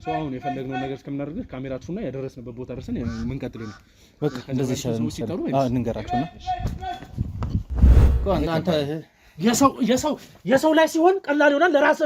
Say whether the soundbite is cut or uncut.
cut